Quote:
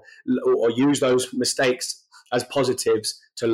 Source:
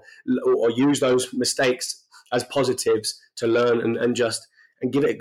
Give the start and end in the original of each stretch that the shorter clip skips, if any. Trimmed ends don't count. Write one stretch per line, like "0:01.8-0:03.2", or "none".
none